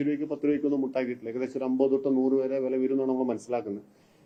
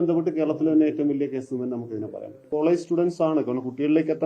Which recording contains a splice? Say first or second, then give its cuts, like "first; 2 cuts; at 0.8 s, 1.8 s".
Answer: second; 1 cut; at 2.5 s